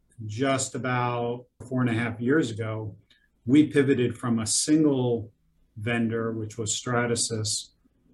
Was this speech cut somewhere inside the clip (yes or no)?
yes